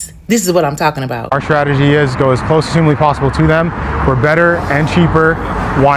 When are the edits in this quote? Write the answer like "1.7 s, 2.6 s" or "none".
none